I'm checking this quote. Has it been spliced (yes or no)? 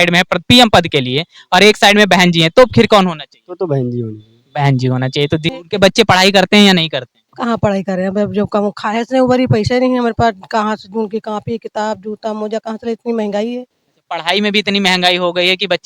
yes